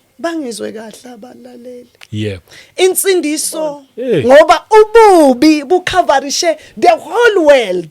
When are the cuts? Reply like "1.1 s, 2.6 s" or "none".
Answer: 3.9 s